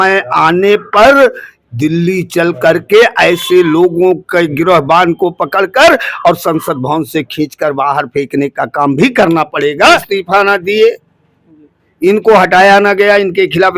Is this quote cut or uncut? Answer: cut